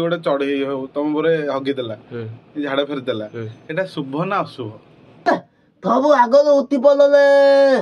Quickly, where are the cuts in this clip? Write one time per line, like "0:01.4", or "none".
0:05.3